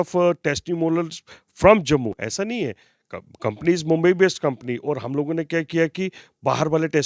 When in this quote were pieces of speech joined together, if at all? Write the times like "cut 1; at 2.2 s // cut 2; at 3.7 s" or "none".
none